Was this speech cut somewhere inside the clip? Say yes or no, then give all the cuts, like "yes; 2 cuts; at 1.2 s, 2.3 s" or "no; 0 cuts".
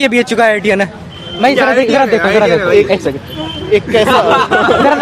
no; 0 cuts